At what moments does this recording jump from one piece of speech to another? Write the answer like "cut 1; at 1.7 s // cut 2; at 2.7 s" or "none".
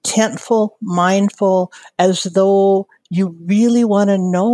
none